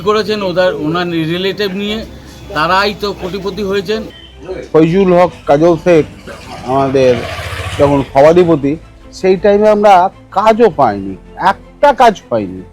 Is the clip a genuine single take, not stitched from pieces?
no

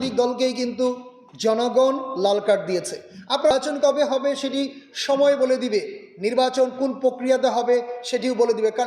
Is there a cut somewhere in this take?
yes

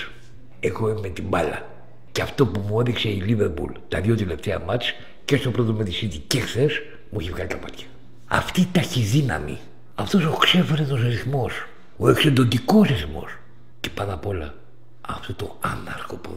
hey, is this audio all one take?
no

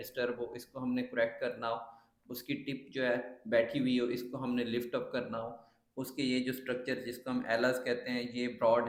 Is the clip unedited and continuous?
yes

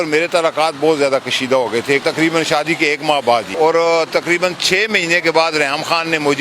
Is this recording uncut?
no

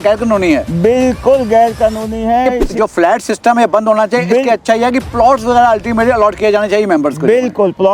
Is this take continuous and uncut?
no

